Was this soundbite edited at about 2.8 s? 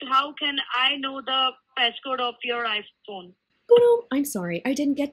no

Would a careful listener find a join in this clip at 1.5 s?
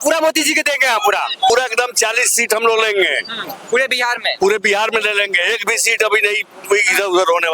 yes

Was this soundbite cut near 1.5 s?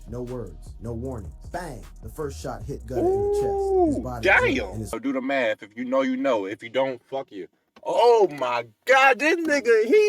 no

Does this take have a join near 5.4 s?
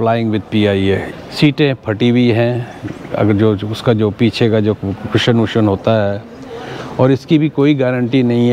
no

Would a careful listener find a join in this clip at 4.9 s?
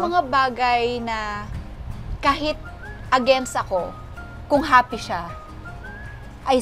no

